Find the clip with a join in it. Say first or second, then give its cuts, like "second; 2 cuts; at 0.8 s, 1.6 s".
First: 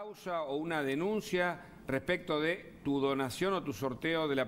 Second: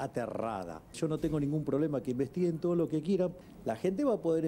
second; 2 cuts; at 1.0 s, 3.4 s